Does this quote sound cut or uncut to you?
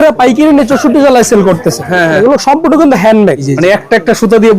cut